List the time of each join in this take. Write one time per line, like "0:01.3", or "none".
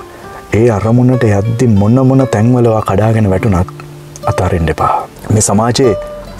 0:05.1